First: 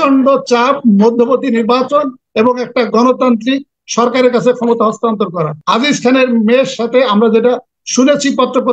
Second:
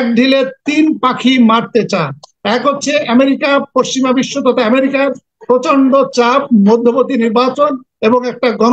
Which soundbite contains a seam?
first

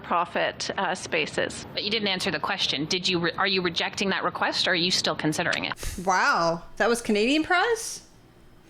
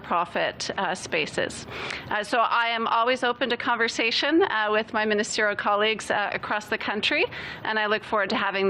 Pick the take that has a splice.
first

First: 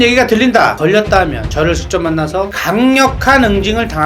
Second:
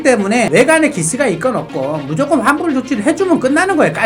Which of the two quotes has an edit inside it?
first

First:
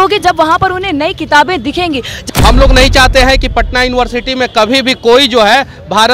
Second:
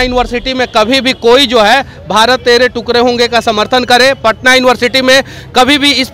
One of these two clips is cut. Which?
first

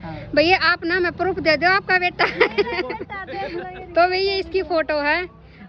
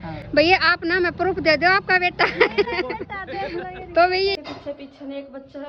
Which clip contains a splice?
second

